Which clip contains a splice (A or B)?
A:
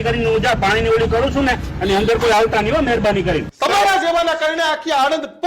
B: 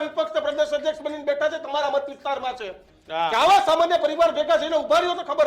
A